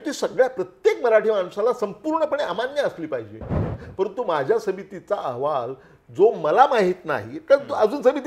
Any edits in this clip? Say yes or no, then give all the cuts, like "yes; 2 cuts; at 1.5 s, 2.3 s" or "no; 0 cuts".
yes; 1 cut; at 3.8 s